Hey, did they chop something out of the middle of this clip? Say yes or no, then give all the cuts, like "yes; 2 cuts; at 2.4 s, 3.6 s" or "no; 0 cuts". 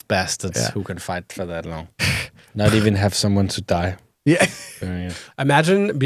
yes; 2 cuts; at 2.5 s, 5.2 s